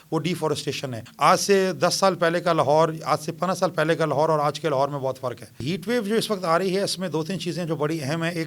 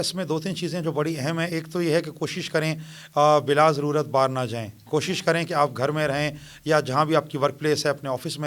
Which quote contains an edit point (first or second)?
first